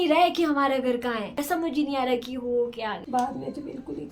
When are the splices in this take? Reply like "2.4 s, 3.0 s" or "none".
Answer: 1.4 s, 3.0 s